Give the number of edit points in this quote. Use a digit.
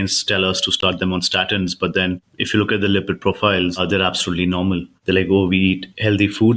3